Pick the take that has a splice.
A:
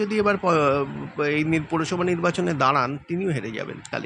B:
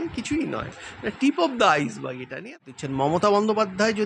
B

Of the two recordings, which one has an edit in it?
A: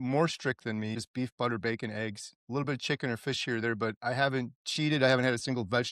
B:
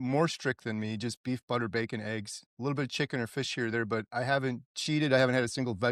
A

